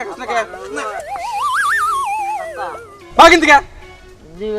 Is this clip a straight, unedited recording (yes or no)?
no